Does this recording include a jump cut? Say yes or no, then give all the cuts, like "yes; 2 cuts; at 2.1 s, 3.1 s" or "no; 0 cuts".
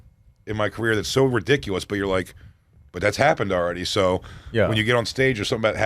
no; 0 cuts